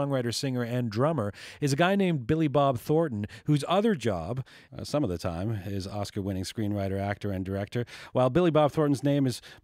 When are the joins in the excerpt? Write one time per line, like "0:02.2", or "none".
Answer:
none

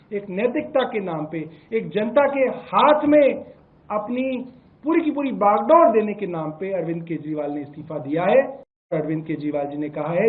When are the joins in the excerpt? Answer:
0:08.9

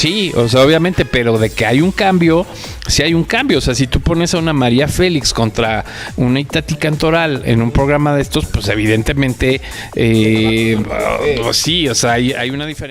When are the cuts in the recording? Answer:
none

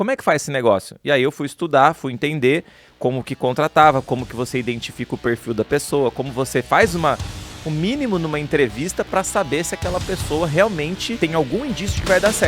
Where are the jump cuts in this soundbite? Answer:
0:11.1

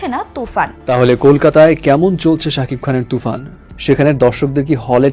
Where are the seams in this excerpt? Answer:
0:00.9

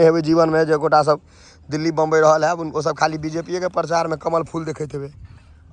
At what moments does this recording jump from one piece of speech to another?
none

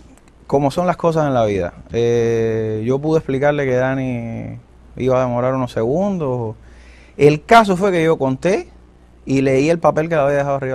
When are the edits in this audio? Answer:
0:02.7

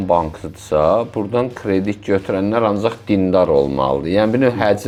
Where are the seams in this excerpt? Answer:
none

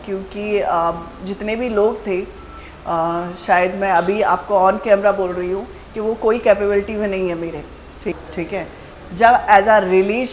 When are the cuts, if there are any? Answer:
0:08.2

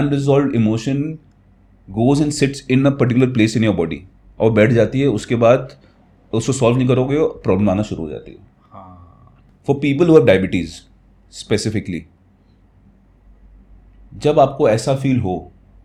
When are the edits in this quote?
none

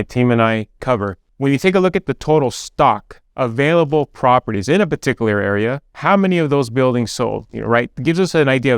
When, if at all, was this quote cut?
0:01.2

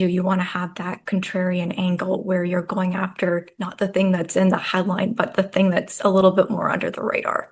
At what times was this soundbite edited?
none

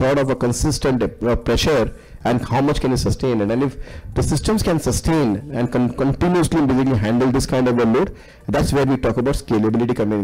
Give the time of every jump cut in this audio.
none

